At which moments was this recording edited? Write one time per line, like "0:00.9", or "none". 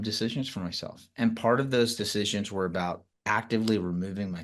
0:03.1